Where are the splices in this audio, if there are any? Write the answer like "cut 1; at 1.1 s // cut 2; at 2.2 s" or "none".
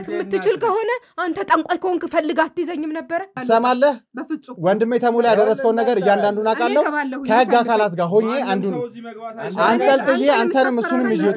cut 1; at 3.4 s